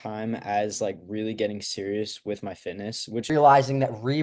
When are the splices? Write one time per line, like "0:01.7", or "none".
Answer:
0:03.3

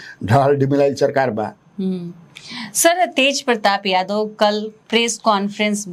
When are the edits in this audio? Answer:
none

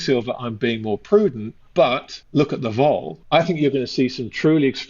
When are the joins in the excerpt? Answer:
0:02.1
0:03.1

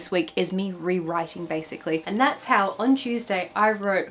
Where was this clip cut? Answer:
0:02.0

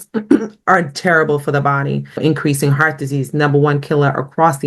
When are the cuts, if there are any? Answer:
0:02.2

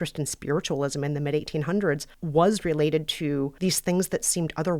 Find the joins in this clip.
0:02.1
0:03.5

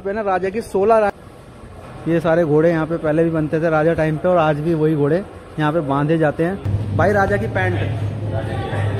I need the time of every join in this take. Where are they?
0:01.1
0:06.7

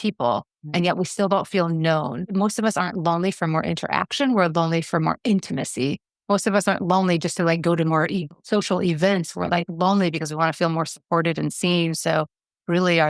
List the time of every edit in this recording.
0:02.2

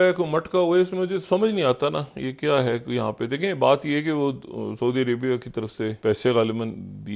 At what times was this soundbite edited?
0:06.0

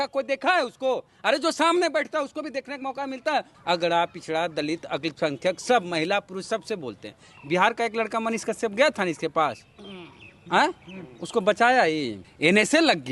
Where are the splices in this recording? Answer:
0:03.5
0:12.2

